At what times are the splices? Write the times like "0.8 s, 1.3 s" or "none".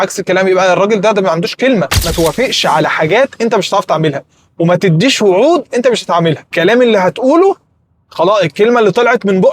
2.0 s, 6.5 s